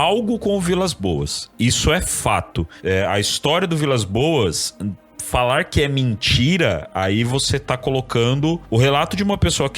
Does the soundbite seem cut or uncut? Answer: cut